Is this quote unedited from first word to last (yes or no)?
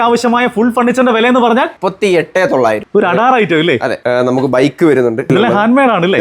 no